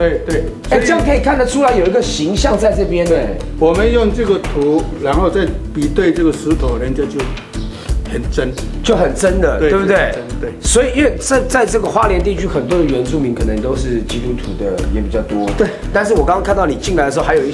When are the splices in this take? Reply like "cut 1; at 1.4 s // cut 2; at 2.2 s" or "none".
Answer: none